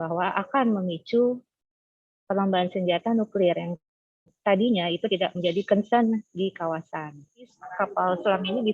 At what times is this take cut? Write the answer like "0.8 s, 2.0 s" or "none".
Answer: 7.6 s